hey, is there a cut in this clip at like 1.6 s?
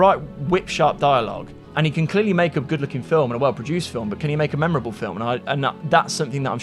yes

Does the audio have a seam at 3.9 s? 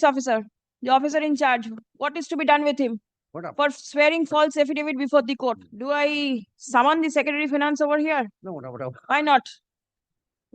no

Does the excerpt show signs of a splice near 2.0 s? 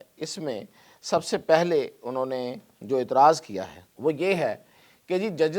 no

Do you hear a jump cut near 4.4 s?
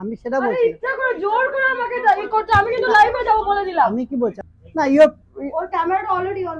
yes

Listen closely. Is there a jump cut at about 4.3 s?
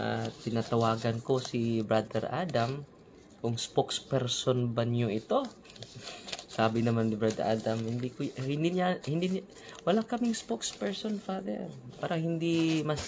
no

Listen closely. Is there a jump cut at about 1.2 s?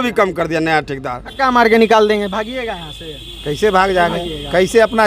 yes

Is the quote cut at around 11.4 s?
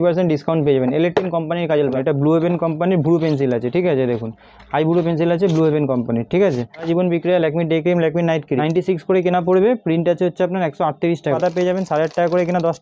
yes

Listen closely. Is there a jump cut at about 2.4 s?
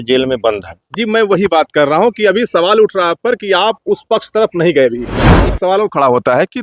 no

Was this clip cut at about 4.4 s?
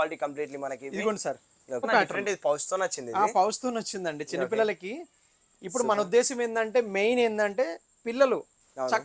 no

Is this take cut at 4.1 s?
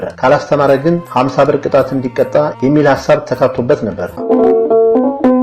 yes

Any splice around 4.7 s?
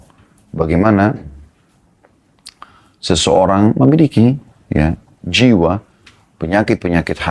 no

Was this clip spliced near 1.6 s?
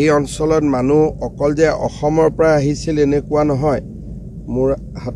no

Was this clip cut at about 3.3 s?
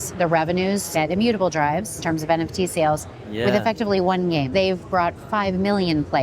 no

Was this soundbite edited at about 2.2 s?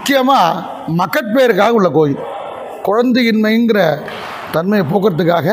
no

